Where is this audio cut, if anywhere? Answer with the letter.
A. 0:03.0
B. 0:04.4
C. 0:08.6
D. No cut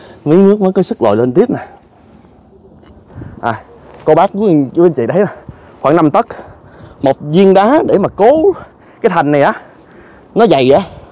A